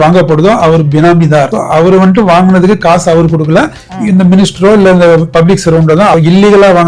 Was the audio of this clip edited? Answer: yes; 2 cuts; at 1.5 s, 6.1 s

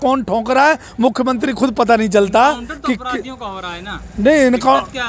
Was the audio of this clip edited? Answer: no; 0 cuts

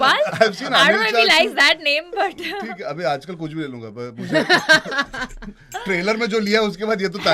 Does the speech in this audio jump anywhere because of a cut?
no; 0 cuts

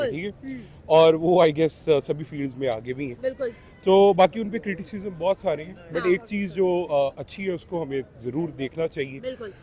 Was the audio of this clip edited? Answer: no; 0 cuts

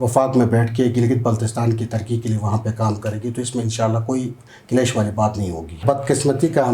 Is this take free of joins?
no; 1 cut; at 5.8 s

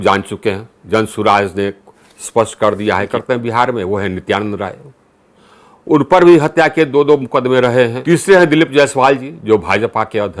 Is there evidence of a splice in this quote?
yes; 2 cuts; at 3.1 s, 8.0 s

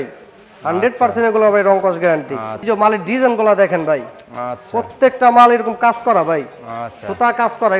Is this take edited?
yes; 1 cut; at 2.6 s

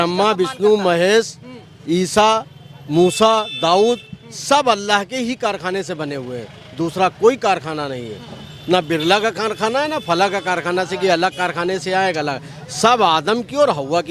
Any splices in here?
no; 0 cuts

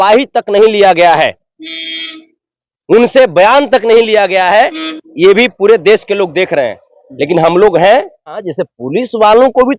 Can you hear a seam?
yes; 1 cut; at 8.5 s

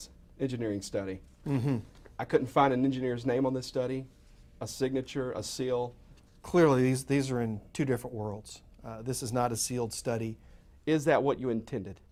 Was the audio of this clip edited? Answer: no; 0 cuts

